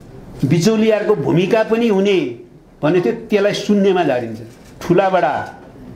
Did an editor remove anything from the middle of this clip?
yes; 1 cut; at 4.7 s

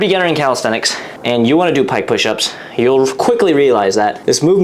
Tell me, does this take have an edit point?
no; 0 cuts

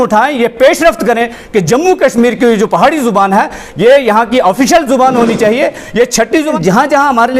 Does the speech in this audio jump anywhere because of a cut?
yes; 1 cut; at 6.1 s

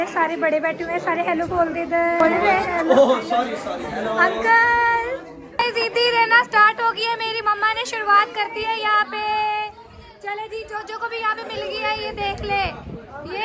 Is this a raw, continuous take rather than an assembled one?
no; 2 cuts; at 2.2 s, 5.2 s

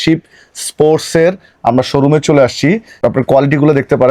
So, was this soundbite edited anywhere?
yes; 1 cut; at 2.9 s

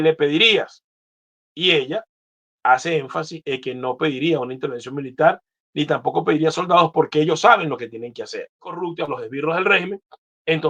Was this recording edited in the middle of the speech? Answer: yes; 1 cut; at 8.8 s

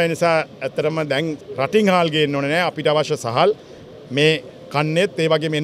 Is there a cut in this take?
yes; 1 cut; at 1.4 s

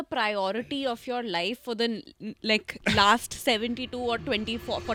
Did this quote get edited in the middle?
no; 0 cuts

